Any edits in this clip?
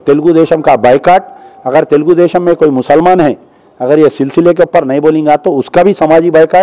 no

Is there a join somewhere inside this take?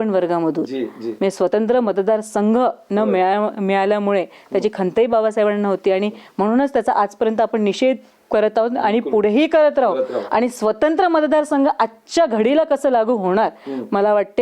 no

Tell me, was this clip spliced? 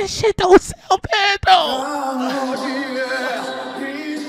no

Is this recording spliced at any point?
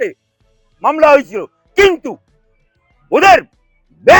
no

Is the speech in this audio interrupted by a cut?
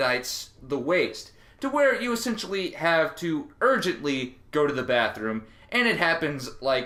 no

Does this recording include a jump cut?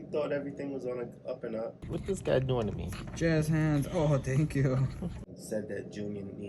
yes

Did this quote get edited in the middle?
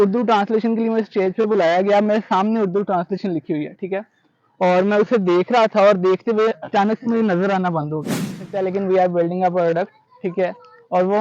yes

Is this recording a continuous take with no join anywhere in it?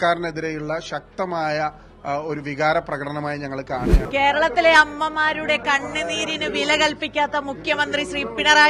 no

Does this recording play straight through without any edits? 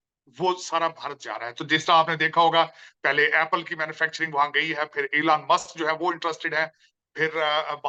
yes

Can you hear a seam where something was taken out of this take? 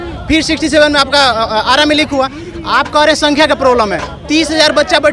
no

